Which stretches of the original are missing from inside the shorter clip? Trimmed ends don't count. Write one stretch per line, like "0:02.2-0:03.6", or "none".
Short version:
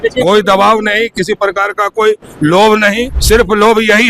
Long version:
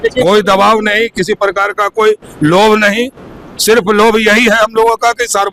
0:03.1-0:03.5